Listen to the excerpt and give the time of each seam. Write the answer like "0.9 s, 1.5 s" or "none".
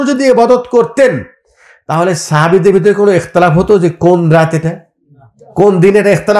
none